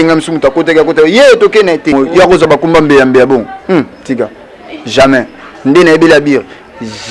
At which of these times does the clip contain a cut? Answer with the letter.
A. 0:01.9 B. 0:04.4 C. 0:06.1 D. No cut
A